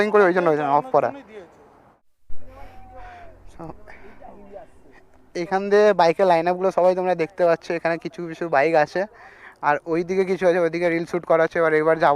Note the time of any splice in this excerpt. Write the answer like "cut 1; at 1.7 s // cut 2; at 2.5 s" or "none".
cut 1; at 1.9 s